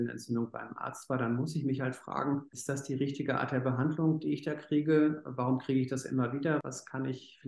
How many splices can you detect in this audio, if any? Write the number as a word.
two